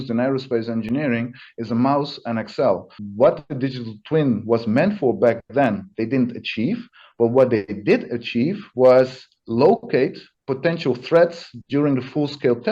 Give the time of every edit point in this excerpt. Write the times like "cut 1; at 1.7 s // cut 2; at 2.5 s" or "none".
cut 1; at 3.0 s